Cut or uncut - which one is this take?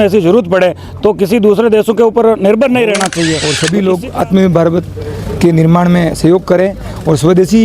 cut